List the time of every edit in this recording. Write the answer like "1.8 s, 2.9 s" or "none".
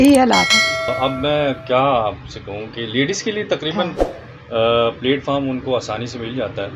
0.9 s

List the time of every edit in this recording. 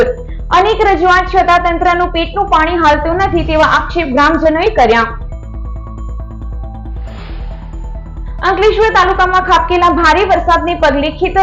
none

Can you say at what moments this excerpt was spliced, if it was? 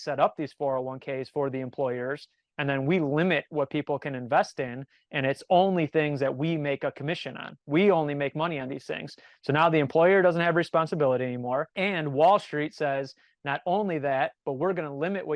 11.7 s

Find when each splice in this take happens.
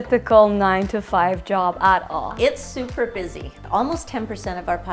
2.3 s, 3.6 s

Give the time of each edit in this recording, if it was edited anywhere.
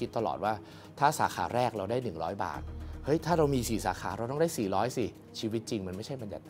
5.2 s

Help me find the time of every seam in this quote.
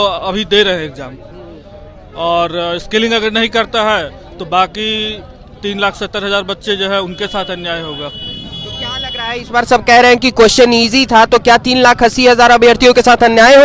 none

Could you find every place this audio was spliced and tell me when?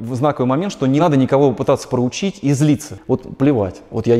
1.0 s, 2.9 s

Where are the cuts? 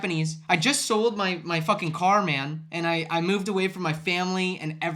none

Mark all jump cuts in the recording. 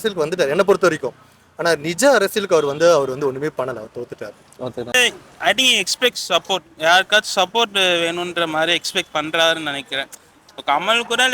5.0 s

